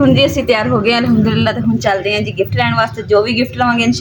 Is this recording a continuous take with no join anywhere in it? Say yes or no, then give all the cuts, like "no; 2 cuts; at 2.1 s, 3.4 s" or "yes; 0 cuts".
yes; 0 cuts